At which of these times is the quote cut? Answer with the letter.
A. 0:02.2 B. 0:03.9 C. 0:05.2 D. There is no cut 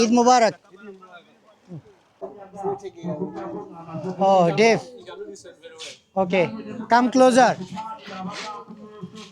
A